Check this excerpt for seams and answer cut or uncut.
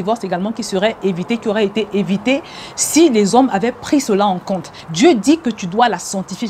cut